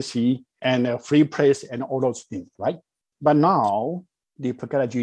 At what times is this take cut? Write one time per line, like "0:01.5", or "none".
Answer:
none